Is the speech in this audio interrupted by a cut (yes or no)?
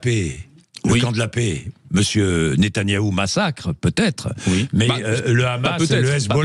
no